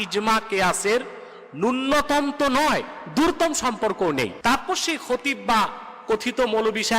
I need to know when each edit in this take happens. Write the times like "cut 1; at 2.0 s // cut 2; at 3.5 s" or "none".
cut 1; at 4.3 s